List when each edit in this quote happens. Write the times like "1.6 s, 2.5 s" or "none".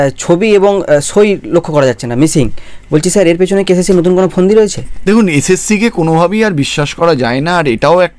4.9 s